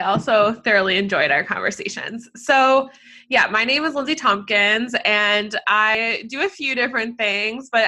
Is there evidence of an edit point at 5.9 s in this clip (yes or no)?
yes